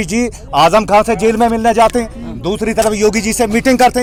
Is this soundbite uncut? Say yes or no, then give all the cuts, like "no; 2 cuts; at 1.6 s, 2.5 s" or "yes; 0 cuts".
yes; 0 cuts